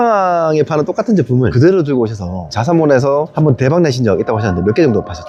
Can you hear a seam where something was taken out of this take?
no; 0 cuts

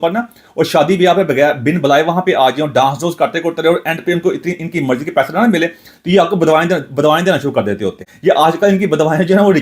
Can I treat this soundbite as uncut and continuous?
no; 1 cut; at 8.1 s

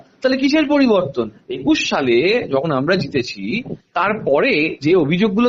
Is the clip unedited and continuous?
no; 1 cut; at 1.4 s

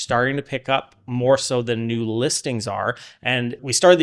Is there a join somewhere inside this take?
no; 0 cuts

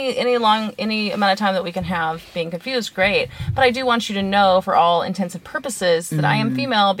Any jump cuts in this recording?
no; 0 cuts

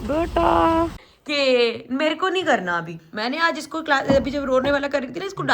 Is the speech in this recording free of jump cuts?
no; 1 cut; at 1.0 s

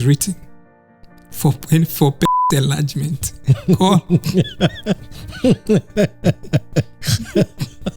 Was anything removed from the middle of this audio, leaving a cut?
no; 0 cuts

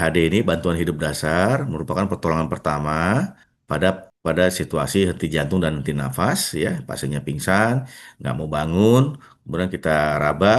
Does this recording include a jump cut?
yes; 1 cut; at 3.8 s

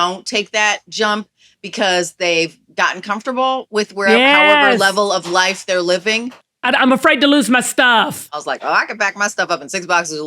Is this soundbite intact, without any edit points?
no; 2 cuts; at 6.6 s, 8.3 s

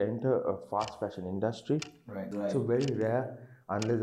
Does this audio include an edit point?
yes; 1 cut; at 2.3 s

